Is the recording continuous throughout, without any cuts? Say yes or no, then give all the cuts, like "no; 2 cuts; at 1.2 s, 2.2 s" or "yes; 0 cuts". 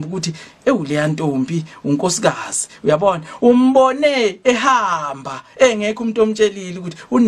yes; 0 cuts